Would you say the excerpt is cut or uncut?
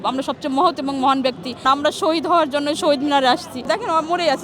cut